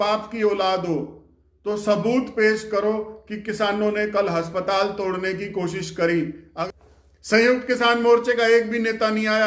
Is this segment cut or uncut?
cut